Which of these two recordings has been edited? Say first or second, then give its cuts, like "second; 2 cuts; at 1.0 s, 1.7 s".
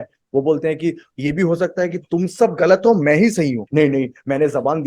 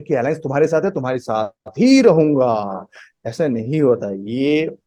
first; 1 cut; at 3.6 s